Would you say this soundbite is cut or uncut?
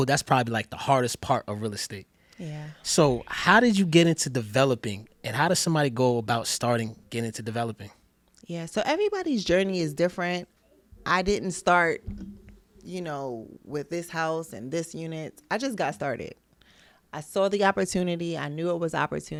uncut